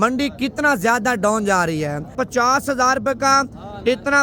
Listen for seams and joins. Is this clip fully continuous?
no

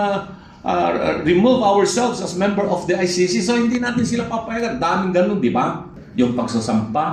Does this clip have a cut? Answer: yes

